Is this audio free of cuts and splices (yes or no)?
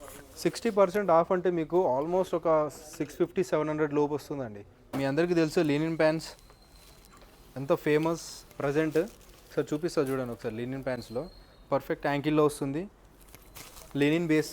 no